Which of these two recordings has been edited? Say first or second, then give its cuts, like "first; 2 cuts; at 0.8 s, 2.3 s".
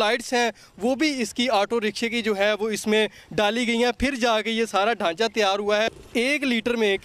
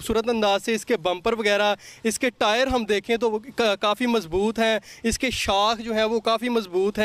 first; 1 cut; at 6.0 s